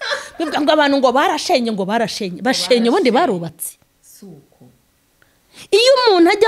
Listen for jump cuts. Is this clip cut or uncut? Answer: uncut